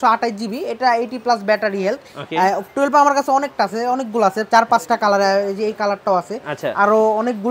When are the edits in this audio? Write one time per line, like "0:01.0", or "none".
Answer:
none

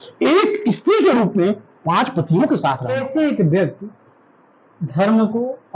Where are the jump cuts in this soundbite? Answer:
0:03.0

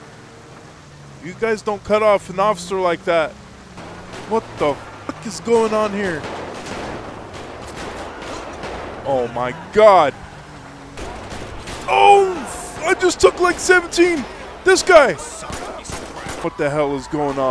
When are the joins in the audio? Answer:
0:16.3

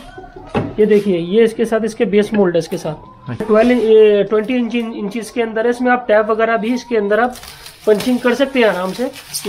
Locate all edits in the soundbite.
0:03.4

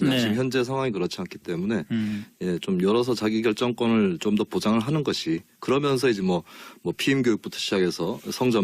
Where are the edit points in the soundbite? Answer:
0:04.5

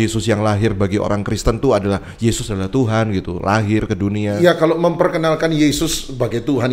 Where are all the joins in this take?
none

